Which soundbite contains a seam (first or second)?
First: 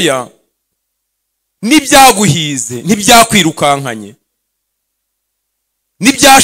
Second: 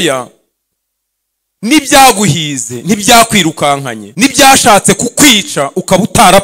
second